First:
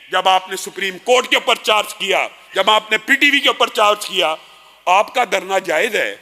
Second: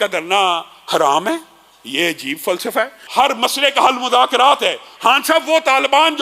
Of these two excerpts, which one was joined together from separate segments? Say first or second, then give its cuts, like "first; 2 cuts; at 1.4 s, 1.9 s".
second; 2 cuts; at 3.0 s, 4.9 s